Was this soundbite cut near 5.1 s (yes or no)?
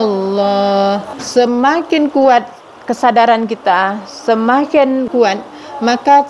yes